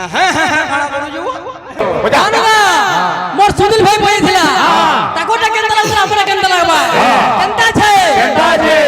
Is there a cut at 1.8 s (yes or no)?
yes